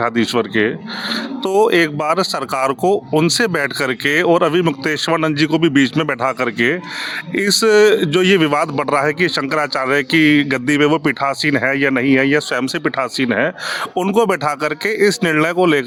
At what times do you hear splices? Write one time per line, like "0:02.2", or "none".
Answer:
none